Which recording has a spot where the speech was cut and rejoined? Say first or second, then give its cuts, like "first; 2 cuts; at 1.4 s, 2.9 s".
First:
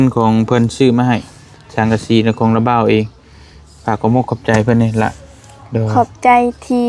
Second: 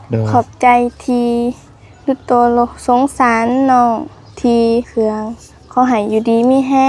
second; 1 cut; at 4.9 s